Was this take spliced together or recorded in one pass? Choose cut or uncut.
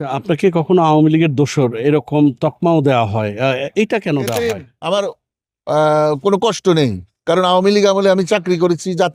cut